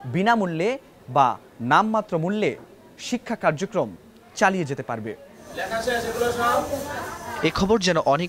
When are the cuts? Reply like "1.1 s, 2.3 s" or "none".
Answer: none